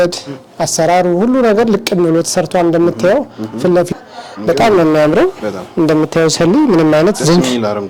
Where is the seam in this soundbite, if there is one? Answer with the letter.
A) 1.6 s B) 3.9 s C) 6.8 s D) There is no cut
B